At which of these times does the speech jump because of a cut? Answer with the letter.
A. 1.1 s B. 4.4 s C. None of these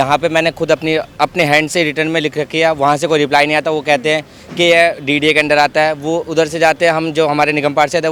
C